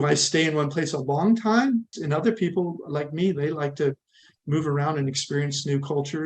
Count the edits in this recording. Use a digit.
1